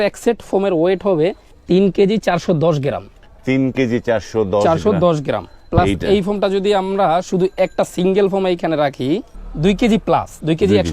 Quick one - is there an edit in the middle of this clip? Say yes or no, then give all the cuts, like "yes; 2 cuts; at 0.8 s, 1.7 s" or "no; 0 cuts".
yes; 2 cuts; at 1.5 s, 9.4 s